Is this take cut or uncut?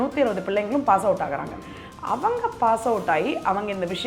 uncut